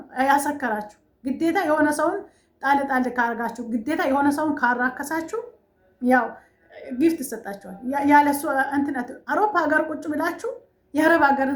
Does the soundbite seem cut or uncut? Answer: uncut